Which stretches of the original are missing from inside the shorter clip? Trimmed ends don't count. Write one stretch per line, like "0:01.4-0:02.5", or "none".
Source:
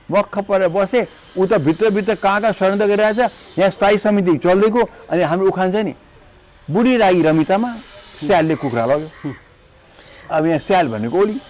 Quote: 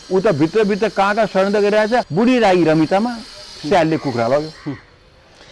0:03.3-0:06.7